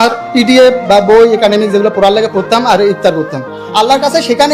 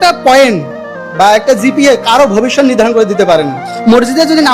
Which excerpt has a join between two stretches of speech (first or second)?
second